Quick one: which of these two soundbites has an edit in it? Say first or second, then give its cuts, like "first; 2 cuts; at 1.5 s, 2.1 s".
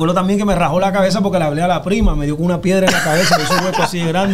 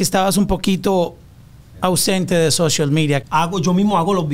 second; 1 cut; at 3.2 s